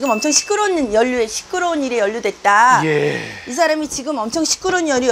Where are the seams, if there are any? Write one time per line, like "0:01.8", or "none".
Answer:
none